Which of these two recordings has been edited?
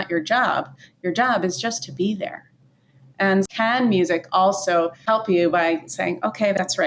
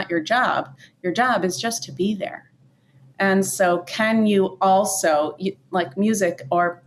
first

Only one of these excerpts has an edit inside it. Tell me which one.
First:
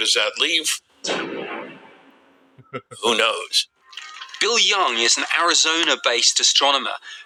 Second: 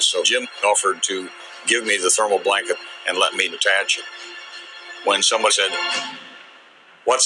second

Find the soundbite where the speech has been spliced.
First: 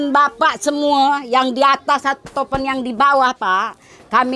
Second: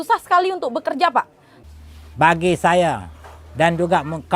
second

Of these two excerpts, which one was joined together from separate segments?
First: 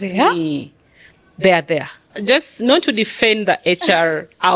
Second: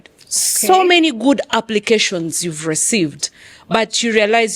first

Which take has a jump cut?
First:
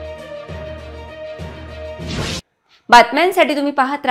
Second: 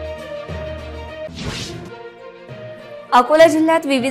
second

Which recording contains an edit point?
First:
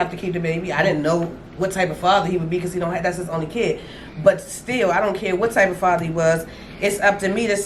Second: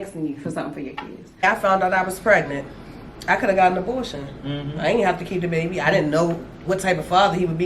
second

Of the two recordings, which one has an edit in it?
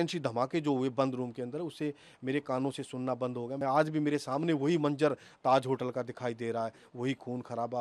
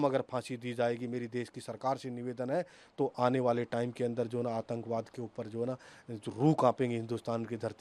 first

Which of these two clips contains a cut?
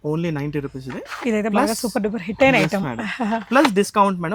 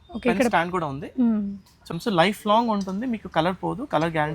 second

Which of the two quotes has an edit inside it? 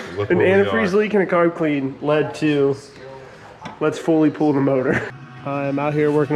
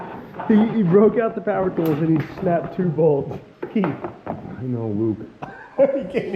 first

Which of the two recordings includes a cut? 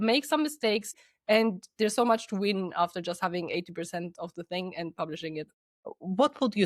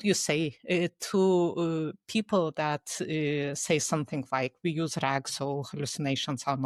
first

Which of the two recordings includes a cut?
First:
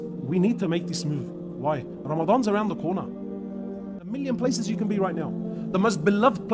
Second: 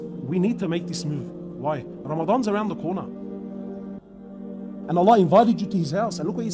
first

